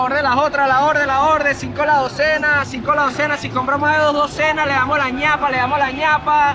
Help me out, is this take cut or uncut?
uncut